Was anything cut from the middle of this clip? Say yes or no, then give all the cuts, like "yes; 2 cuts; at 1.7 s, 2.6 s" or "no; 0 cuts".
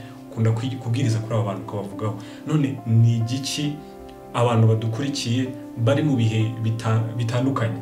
no; 0 cuts